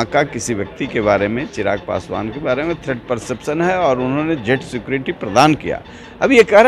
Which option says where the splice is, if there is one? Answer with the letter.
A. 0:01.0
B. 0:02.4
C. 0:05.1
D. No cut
D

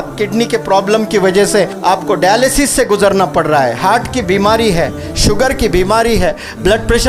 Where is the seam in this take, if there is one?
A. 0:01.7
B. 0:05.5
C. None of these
A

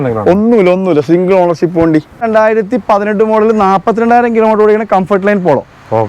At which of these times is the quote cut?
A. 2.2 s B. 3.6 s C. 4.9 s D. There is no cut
A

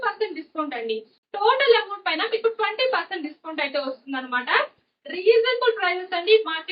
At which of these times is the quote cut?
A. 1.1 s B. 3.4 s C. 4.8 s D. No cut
A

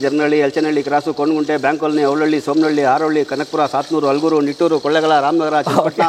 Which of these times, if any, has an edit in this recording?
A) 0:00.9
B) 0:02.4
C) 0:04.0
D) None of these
D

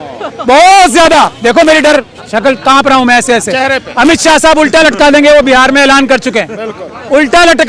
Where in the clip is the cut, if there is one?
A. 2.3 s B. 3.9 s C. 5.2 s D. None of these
D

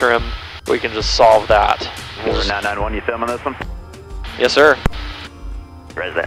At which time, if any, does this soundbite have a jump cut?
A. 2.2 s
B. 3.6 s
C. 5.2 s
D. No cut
A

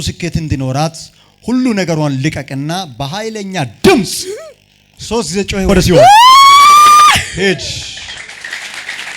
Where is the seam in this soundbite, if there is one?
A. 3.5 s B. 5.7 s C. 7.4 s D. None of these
B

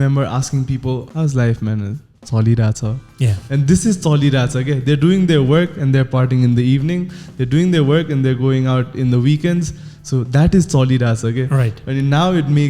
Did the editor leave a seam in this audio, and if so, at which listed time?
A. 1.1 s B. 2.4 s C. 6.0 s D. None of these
A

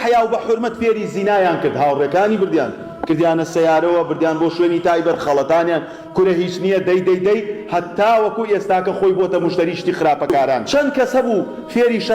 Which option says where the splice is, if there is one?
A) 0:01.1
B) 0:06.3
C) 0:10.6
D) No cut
C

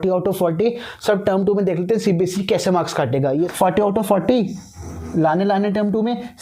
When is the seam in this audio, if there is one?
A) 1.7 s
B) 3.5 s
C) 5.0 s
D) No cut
B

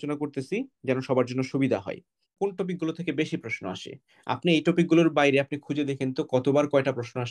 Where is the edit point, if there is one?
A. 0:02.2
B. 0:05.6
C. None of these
A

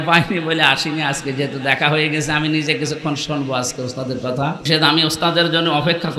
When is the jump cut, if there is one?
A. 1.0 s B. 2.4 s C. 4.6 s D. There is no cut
C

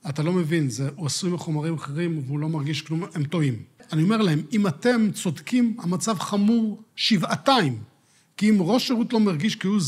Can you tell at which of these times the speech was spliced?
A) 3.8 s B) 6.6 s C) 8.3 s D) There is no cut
A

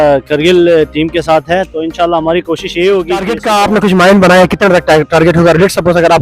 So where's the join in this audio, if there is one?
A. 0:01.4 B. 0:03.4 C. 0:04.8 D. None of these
B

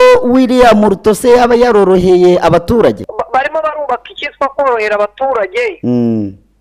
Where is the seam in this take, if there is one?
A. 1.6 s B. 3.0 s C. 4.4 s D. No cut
B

